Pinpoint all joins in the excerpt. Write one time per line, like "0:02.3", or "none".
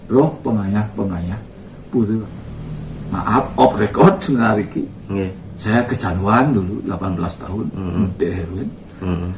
0:02.2